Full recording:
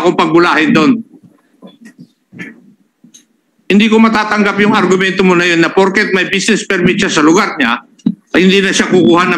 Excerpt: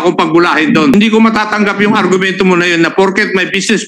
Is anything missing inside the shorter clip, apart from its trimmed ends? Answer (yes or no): yes